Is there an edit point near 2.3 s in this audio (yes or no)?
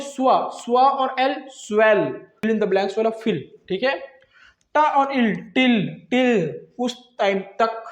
yes